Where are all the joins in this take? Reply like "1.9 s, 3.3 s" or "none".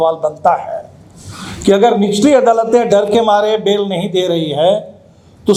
none